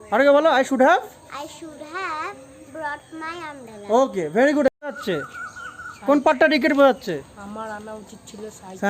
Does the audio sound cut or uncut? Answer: cut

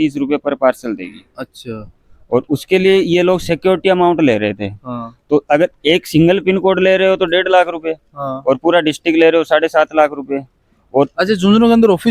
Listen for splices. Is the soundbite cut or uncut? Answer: uncut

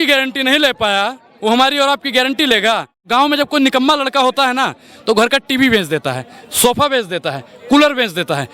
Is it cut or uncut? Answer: cut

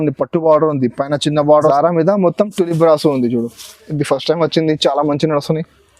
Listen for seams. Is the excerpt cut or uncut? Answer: cut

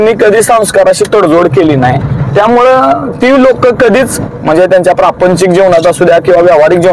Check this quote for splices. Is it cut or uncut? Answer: uncut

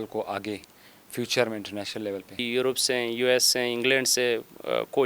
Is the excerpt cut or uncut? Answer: cut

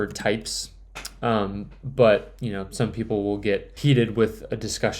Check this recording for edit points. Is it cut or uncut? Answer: cut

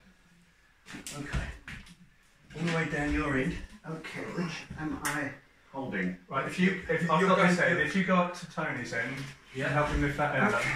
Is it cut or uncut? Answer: uncut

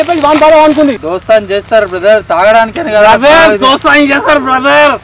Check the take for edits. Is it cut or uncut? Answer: cut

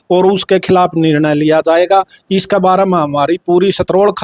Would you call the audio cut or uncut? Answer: uncut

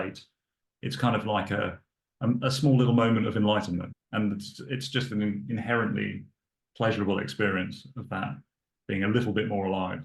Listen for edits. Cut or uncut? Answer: cut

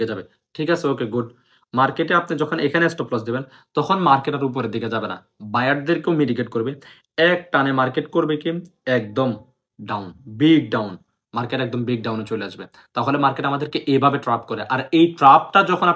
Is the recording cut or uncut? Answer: uncut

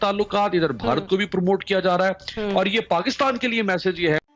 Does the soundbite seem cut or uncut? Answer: uncut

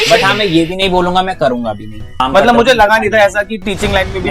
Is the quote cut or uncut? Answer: cut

